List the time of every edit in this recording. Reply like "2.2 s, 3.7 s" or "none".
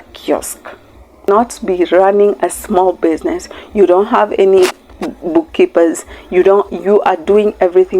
1.3 s